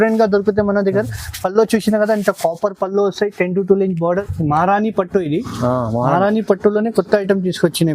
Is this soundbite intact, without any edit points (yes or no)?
no